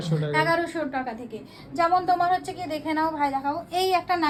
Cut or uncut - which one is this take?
uncut